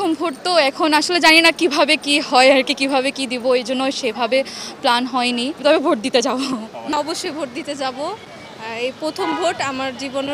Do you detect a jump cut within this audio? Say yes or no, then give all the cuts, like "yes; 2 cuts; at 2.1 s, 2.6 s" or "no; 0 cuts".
yes; 2 cuts; at 5.6 s, 6.9 s